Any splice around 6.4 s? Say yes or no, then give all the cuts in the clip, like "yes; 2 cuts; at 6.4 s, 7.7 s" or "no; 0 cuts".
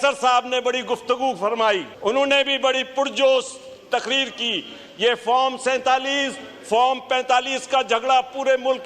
no; 1 cut; at 1.9 s